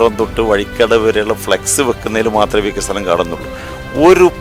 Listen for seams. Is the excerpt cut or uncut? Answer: uncut